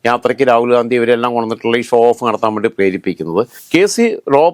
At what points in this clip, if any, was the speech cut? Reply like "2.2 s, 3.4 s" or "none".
3.6 s

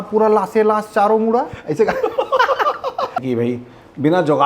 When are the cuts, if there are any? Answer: 3.2 s

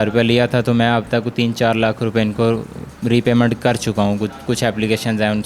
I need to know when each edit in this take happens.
none

